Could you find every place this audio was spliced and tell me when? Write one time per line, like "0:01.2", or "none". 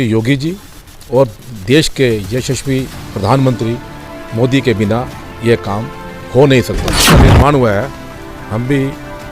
0:07.0